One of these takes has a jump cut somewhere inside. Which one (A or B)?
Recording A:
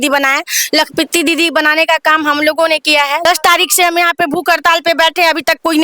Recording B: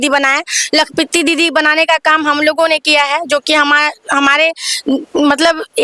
A